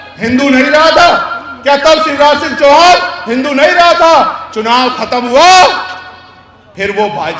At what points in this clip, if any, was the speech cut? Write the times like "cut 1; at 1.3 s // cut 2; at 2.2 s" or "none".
none